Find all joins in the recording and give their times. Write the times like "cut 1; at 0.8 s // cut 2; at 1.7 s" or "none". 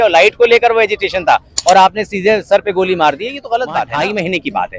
cut 1; at 3.9 s